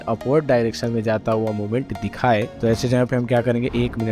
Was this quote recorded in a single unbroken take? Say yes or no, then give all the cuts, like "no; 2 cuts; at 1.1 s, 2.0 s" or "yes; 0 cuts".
yes; 0 cuts